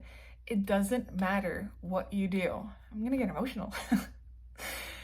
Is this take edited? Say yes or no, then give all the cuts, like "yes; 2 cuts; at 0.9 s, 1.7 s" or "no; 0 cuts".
no; 0 cuts